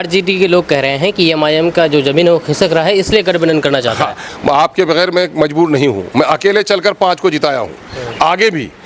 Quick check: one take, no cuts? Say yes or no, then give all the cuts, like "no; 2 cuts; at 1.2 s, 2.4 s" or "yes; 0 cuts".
no; 1 cut; at 4.3 s